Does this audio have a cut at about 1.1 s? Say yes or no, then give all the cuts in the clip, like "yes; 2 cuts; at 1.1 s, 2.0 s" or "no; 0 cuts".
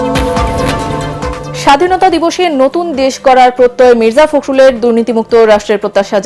yes; 1 cut; at 1.1 s